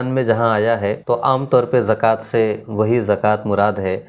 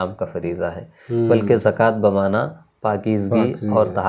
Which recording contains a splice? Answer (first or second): first